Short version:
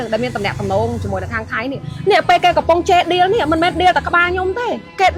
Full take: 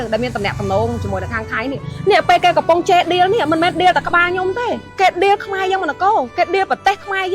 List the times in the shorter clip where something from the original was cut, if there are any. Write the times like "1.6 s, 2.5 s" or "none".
none

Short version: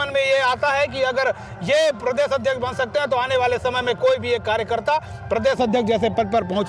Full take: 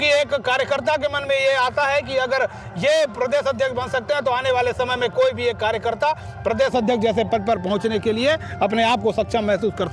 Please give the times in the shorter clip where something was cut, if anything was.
none

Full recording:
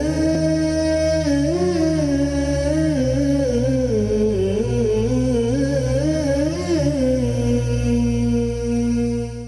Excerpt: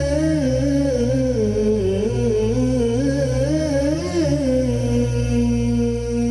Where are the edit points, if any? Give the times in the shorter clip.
none

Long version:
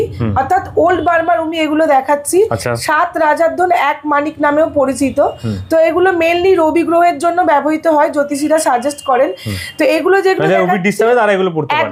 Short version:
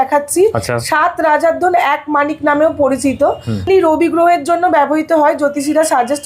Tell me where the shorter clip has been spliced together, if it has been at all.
3.6 s

